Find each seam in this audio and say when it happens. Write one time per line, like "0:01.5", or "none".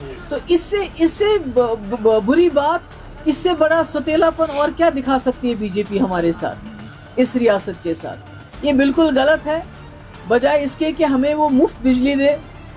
none